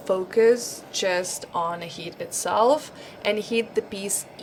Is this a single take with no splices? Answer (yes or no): yes